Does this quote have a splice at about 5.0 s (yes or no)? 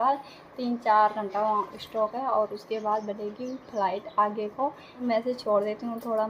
yes